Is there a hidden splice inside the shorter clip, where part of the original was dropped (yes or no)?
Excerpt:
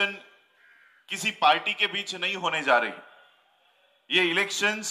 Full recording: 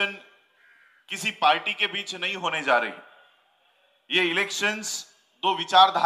no